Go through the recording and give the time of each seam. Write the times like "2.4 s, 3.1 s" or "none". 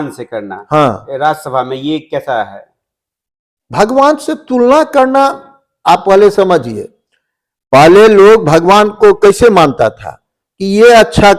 none